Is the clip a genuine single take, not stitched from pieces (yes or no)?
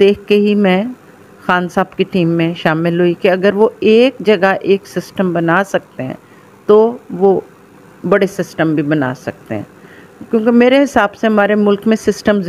yes